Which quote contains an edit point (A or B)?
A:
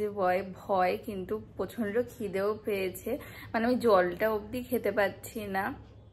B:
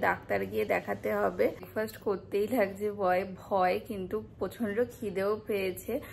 B